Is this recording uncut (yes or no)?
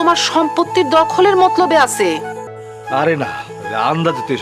no